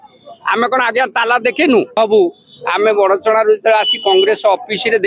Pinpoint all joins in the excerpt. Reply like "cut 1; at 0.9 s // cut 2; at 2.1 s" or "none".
cut 1; at 2.0 s